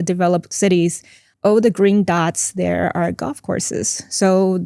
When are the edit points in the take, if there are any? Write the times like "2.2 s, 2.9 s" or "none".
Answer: 1.2 s